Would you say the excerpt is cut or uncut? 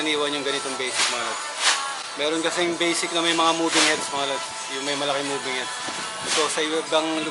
uncut